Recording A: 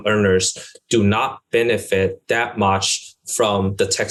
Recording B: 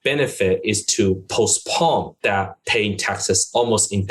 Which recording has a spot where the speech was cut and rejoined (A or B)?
B